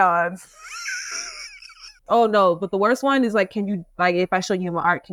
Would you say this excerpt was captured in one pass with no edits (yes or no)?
no